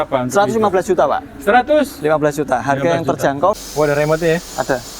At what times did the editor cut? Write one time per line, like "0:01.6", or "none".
0:03.6